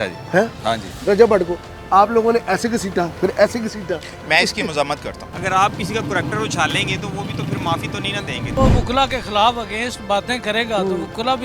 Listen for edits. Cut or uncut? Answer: cut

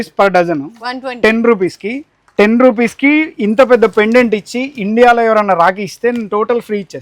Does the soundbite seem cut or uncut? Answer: uncut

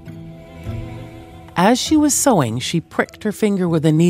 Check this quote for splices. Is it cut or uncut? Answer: cut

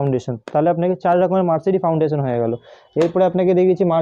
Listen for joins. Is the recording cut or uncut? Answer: uncut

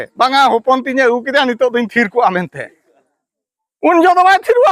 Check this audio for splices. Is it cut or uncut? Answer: uncut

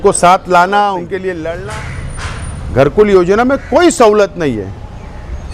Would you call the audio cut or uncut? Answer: cut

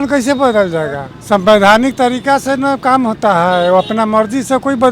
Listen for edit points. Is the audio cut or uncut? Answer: cut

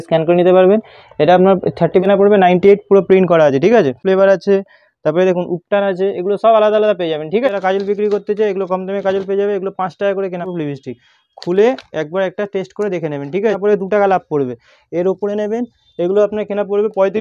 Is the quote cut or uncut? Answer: cut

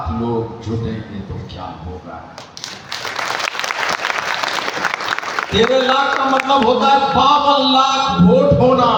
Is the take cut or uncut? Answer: uncut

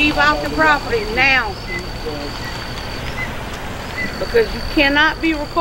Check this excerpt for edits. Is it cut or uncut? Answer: uncut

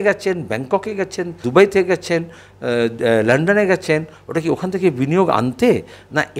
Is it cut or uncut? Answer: cut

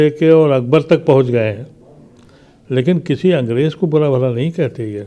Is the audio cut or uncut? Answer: uncut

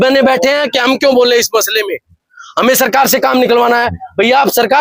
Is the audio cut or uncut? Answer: uncut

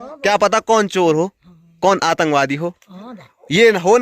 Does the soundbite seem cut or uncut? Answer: uncut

